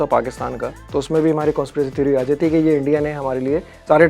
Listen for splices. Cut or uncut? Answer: uncut